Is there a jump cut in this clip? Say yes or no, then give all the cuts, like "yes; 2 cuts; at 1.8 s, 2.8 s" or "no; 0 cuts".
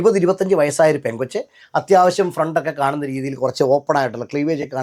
no; 0 cuts